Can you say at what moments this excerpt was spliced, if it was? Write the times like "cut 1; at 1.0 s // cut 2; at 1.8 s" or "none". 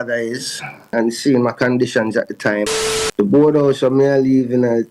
cut 1; at 0.9 s // cut 2; at 2.7 s